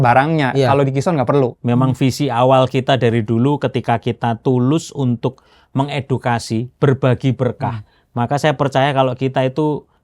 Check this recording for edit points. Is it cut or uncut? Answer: cut